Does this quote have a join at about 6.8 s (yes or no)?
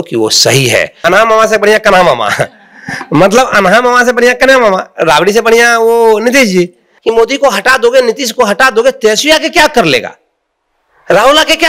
yes